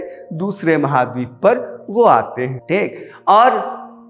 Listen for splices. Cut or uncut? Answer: uncut